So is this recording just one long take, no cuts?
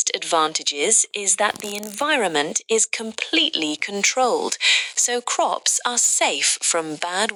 yes; 0 cuts

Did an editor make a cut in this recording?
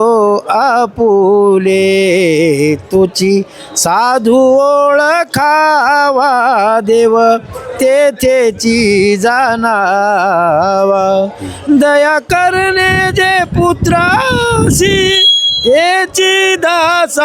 no; 0 cuts

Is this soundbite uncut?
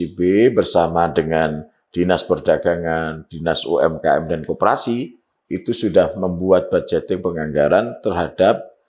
yes; 0 cuts

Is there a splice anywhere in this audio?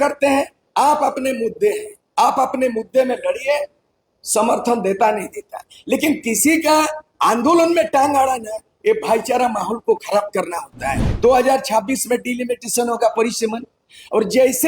yes; 1 cut; at 11.0 s

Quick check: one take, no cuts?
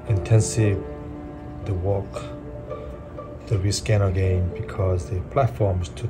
yes; 0 cuts

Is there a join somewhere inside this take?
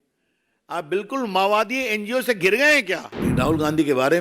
yes; 1 cut; at 3.1 s

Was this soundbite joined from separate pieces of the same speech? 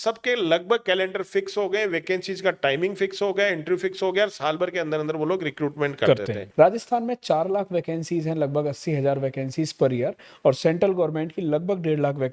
yes; 1 cut; at 6.4 s

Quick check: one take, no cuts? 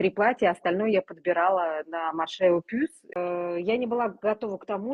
no; 1 cut; at 3.1 s

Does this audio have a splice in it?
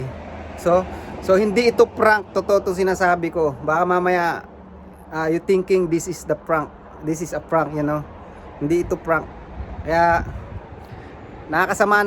no; 0 cuts

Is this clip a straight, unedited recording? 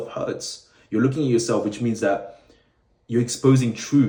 yes; 0 cuts

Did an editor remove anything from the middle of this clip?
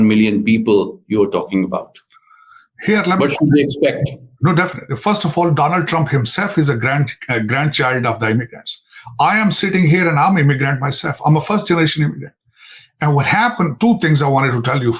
no; 0 cuts

